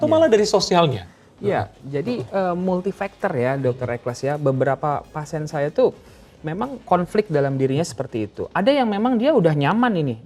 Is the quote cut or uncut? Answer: uncut